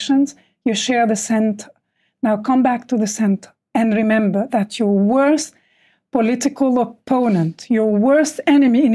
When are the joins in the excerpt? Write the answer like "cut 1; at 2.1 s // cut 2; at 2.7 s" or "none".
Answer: cut 1; at 3.5 s